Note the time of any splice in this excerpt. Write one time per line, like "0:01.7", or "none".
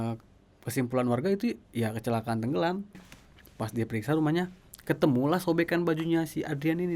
0:03.0